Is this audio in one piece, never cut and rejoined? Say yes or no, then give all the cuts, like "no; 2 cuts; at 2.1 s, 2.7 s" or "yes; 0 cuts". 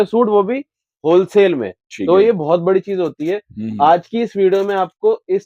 yes; 0 cuts